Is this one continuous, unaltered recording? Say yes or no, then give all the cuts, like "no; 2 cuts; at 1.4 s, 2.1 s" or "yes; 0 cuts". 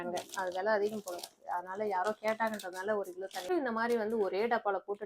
no; 1 cut; at 3.5 s